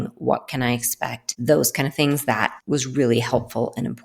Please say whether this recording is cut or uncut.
cut